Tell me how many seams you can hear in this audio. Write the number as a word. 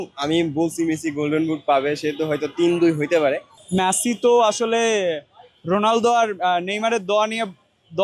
one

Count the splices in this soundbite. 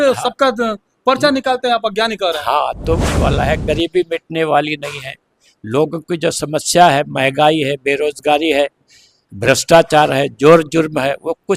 one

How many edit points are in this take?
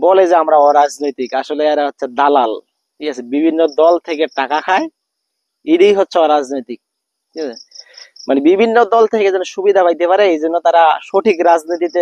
zero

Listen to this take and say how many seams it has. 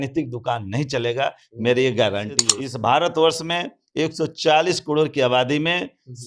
one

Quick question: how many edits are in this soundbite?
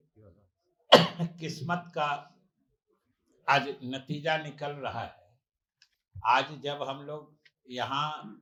zero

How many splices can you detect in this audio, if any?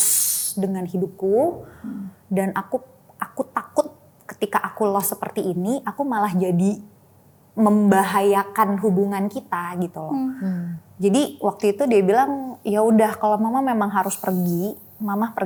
zero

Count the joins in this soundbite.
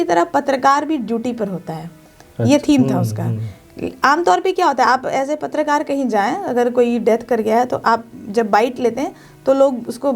zero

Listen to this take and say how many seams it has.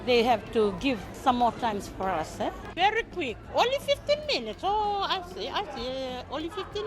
two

